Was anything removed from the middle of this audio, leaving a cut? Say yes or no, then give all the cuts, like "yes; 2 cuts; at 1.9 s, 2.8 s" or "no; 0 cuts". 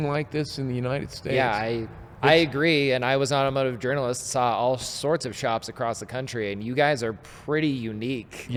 no; 0 cuts